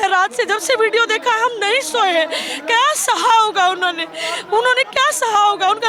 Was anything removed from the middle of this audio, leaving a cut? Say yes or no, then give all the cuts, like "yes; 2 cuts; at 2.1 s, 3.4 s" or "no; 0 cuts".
no; 0 cuts